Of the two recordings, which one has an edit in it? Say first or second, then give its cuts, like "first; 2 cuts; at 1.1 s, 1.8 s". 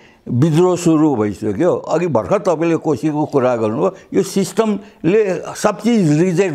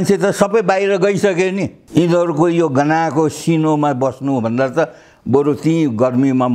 second; 1 cut; at 1.8 s